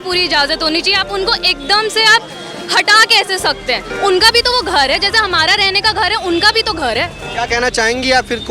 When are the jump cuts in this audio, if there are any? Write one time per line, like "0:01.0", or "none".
0:03.9
0:07.2

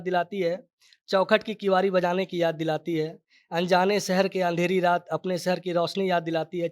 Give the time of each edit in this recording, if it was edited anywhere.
none

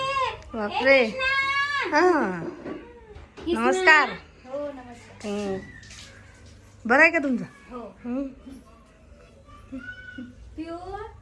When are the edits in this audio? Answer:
none

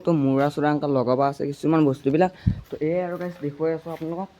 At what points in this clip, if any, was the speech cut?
none

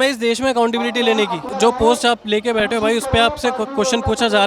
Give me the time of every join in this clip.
0:01.5

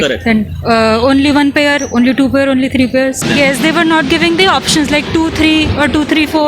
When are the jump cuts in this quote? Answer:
none

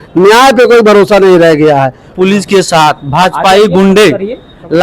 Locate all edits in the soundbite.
0:02.1

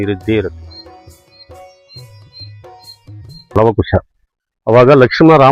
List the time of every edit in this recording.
0:03.6

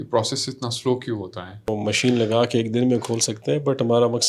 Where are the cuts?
0:01.7

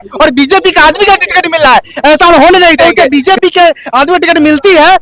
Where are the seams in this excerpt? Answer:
0:02.8

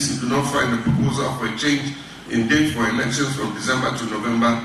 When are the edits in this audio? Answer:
none

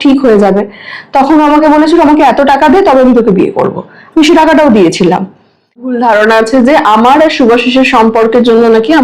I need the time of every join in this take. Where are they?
0:05.9

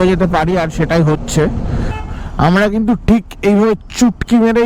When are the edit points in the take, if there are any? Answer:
0:01.9

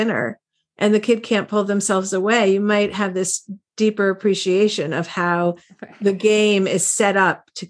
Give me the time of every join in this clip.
none

